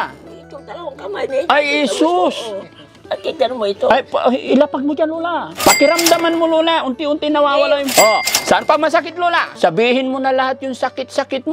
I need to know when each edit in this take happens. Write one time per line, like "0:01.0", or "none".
0:05.5
0:07.9
0:09.5